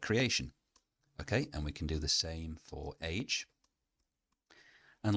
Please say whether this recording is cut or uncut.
uncut